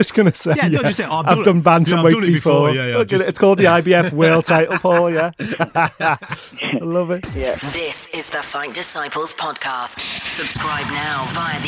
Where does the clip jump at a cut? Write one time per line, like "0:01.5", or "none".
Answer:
0:07.7